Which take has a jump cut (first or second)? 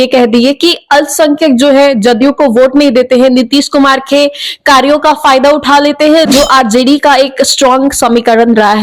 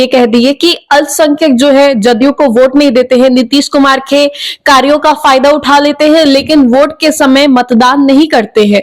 first